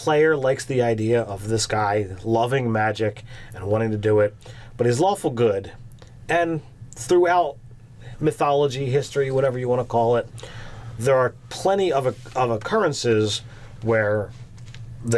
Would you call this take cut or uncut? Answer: uncut